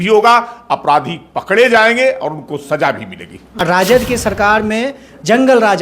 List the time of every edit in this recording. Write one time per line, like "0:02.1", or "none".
0:03.9